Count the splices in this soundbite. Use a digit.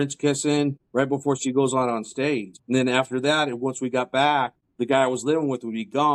3